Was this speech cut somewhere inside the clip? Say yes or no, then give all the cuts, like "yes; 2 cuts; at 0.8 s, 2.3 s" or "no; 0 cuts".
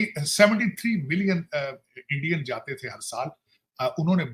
no; 0 cuts